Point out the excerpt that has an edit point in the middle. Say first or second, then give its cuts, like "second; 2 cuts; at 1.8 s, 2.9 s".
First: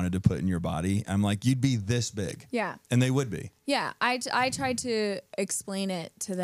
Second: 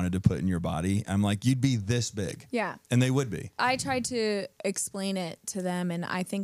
second; 1 cut; at 3.5 s